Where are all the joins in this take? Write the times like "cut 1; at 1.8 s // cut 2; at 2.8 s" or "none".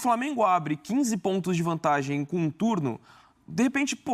none

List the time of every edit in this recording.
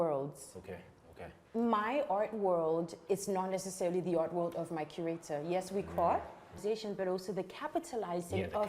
cut 1; at 6.6 s

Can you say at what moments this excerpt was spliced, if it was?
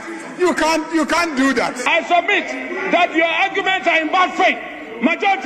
cut 1; at 1.9 s

